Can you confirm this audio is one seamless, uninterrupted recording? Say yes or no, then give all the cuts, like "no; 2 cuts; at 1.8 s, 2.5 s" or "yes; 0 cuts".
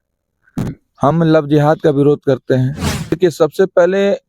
no; 1 cut; at 3.2 s